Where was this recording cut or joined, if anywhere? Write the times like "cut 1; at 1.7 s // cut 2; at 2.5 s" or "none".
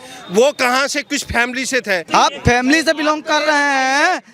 cut 1; at 2.1 s